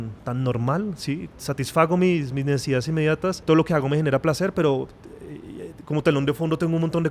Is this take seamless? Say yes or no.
no